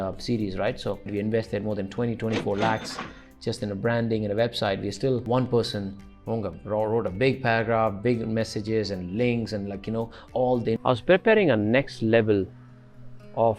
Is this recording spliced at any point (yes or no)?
yes